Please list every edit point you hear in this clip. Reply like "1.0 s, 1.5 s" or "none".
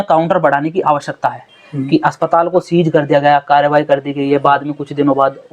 1.5 s